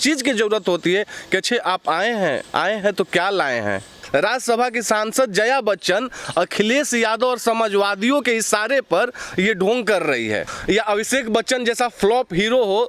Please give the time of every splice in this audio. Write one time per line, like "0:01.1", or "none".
0:04.0
0:10.5